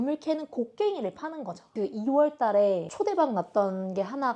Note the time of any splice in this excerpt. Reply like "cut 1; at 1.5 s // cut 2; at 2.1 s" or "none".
cut 1; at 1.7 s // cut 2; at 2.9 s